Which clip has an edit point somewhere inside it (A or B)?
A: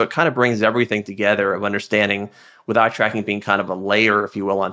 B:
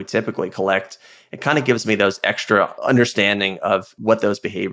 B